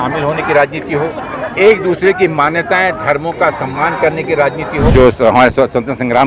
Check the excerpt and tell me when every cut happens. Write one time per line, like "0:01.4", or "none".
0:04.9